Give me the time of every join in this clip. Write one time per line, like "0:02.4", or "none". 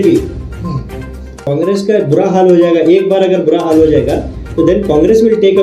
0:01.5